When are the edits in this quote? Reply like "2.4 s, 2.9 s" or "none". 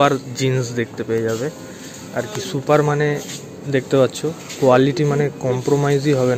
none